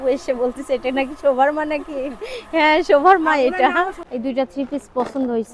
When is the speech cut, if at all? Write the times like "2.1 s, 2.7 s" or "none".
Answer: 4.0 s